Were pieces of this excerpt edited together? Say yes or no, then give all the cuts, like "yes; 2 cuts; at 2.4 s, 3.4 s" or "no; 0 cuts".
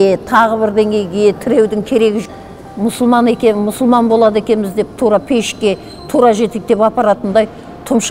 yes; 1 cut; at 2.3 s